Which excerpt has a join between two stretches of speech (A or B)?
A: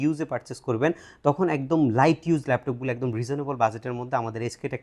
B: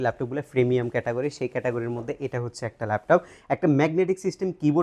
B